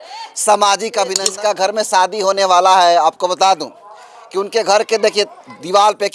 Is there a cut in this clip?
yes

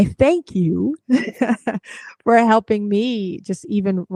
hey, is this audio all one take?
yes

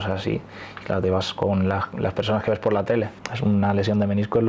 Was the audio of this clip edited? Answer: yes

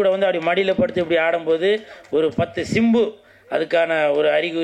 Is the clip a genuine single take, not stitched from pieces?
yes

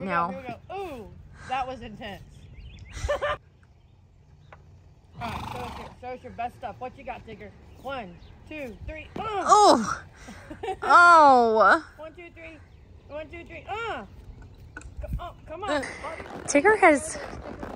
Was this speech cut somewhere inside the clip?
yes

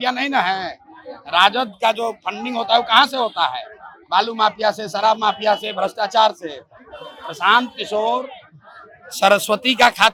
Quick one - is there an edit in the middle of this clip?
no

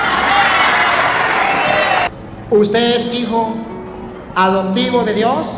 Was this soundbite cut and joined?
yes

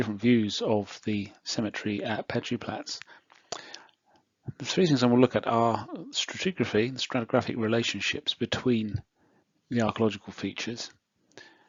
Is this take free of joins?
yes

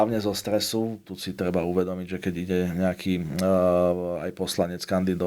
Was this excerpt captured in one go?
no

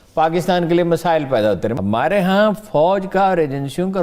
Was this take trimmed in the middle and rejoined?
yes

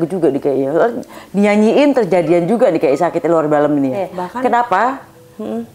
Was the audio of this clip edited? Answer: yes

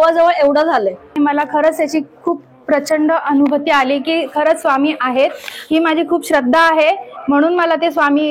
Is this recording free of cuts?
no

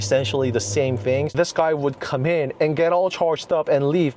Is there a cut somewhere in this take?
yes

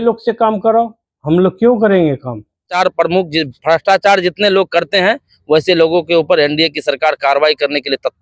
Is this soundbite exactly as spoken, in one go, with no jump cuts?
no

